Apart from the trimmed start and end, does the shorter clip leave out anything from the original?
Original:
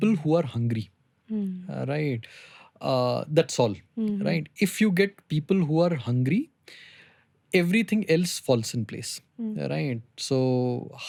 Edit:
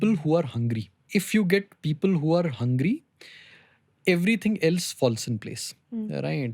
yes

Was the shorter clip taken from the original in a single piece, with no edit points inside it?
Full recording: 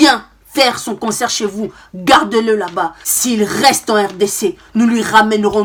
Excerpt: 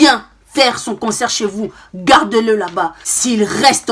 yes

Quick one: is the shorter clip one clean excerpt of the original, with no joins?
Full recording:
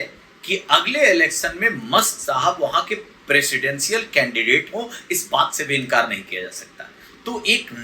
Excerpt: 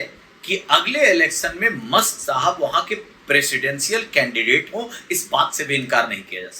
yes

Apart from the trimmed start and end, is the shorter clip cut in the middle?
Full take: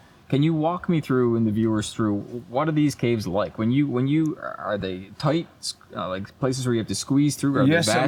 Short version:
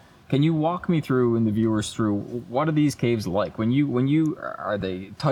no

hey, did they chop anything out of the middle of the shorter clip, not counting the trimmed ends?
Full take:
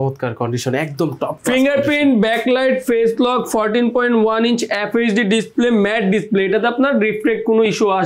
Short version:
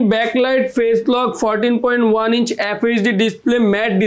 no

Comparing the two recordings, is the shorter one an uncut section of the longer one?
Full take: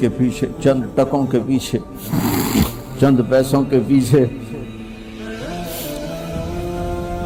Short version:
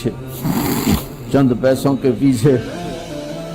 no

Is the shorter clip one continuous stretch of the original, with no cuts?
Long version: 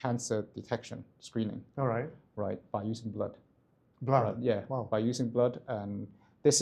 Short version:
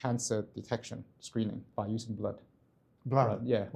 no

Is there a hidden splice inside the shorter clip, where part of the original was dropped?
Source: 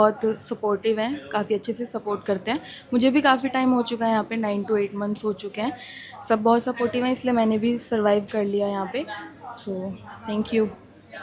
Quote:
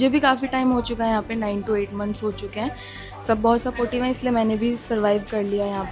no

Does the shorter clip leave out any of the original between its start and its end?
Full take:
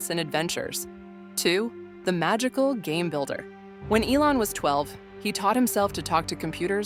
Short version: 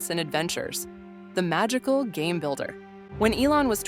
yes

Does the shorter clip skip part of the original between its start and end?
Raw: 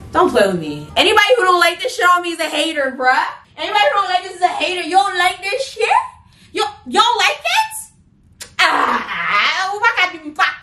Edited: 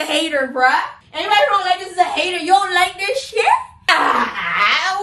yes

